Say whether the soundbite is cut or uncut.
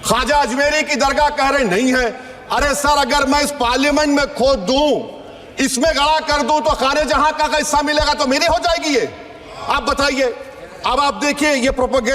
uncut